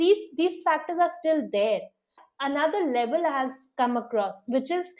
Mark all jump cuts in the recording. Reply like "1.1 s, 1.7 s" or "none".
2.2 s